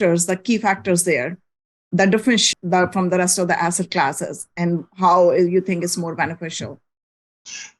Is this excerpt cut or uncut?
cut